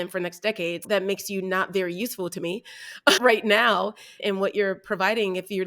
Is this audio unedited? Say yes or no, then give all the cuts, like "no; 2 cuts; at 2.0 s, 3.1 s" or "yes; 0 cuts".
no; 1 cut; at 4.2 s